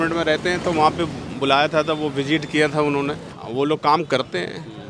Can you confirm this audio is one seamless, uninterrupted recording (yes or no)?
no